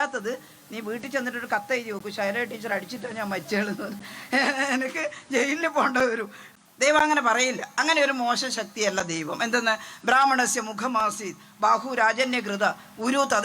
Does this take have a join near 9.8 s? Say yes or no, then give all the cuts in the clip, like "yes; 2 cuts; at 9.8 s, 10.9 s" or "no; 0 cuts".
no; 1 cut; at 6.4 s